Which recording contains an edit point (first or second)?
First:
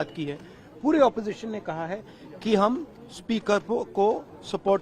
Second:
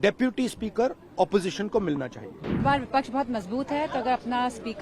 second